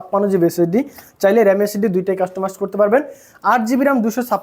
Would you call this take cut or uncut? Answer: uncut